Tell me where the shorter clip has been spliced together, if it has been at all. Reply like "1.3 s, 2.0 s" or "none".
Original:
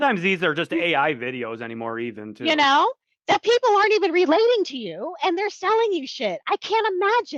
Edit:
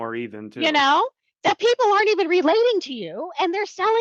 none